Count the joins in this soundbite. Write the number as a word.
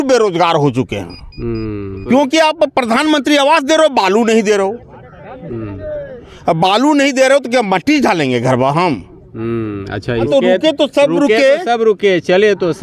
two